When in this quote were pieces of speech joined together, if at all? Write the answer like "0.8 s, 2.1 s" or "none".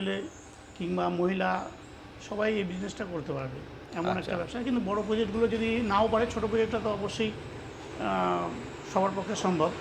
none